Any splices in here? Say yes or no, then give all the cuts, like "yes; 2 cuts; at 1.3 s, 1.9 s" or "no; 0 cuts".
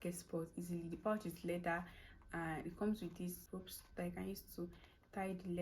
yes; 1 cut; at 3.4 s